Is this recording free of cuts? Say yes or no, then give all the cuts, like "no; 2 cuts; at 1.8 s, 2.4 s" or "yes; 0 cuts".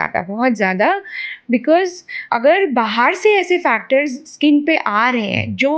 no; 1 cut; at 2.2 s